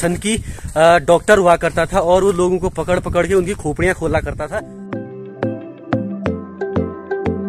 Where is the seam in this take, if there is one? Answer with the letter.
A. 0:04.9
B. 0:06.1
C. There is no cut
A